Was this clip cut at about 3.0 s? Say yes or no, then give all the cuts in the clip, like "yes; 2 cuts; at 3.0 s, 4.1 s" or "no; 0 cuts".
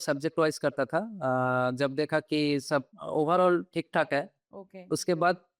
yes; 1 cut; at 3.0 s